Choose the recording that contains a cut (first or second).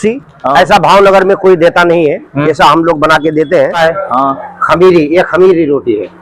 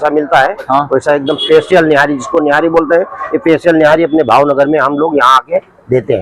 first